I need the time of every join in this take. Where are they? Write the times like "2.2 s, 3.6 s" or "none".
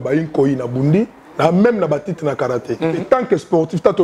3.0 s